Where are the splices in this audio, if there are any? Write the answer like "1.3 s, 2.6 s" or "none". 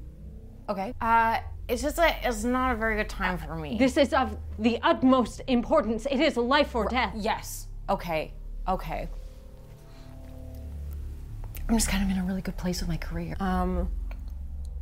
0.9 s, 3.6 s, 13.3 s